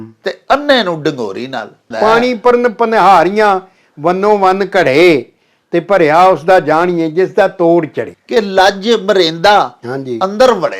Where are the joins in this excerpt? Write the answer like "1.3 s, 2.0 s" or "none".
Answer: 1.9 s, 8.1 s